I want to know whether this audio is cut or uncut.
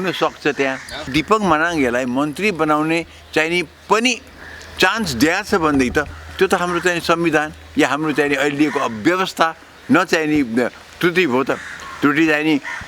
cut